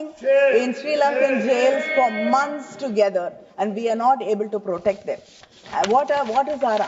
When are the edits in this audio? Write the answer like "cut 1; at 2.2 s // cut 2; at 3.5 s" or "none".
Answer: none

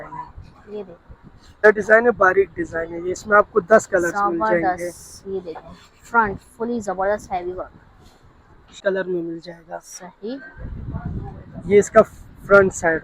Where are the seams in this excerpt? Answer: cut 1; at 1.6 s // cut 2; at 8.8 s

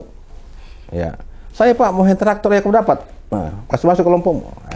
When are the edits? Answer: none

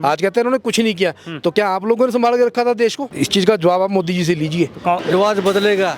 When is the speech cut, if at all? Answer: cut 1; at 3.0 s // cut 2; at 5.0 s

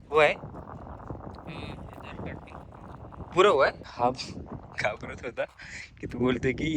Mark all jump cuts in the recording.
cut 1; at 3.8 s

